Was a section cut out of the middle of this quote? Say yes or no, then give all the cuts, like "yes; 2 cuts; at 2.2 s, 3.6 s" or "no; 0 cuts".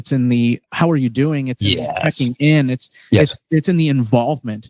no; 0 cuts